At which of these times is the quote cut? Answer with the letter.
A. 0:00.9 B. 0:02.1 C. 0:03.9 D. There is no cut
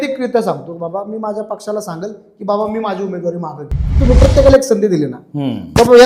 C